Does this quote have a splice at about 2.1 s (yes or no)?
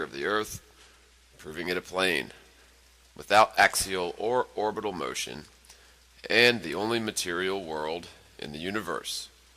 yes